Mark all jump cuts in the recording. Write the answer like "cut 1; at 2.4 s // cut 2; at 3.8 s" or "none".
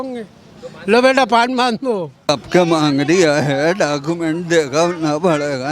cut 1; at 2.3 s